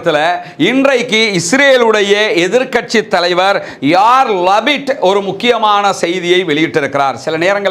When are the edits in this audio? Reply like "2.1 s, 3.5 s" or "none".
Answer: none